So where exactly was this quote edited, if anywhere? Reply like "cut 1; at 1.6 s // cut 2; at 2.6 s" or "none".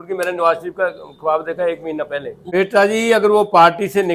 cut 1; at 2.3 s